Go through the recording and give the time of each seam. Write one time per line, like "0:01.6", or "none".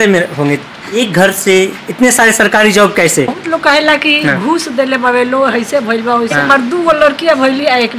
0:01.0
0:03.4
0:06.4